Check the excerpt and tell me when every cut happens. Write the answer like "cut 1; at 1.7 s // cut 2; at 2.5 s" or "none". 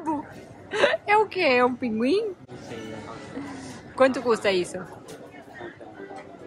none